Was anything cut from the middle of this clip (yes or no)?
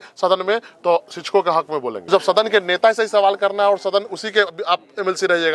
yes